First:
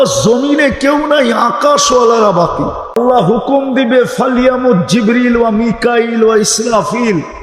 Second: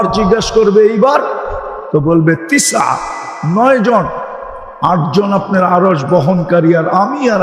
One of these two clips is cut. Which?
first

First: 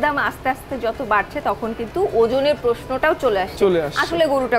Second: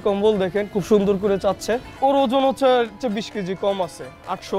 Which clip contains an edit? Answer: second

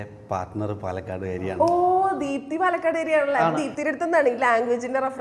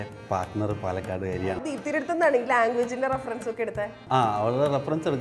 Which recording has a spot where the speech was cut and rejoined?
second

